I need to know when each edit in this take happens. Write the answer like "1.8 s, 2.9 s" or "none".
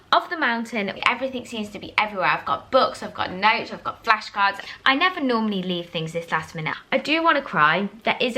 1.0 s, 4.6 s, 6.7 s

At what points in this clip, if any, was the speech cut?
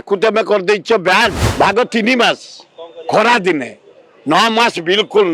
1.4 s

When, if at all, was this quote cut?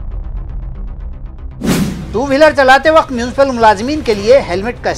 1.7 s

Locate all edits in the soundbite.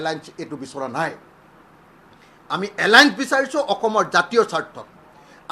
none

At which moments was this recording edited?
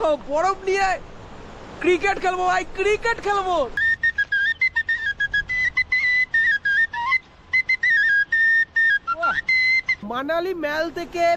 3.7 s

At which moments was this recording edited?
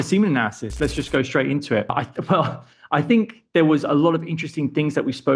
1.9 s

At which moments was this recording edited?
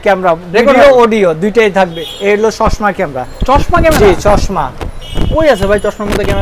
2.0 s

